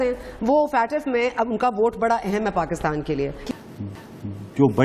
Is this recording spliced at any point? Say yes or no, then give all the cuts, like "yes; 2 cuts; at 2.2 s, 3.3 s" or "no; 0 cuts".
yes; 1 cut; at 3.4 s